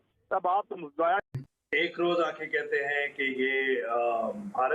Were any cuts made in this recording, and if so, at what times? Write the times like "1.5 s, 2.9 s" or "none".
1.3 s